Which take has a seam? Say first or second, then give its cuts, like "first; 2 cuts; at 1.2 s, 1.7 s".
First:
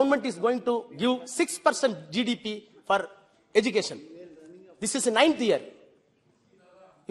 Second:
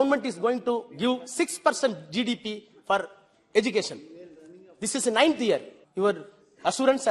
second; 1 cut; at 5.8 s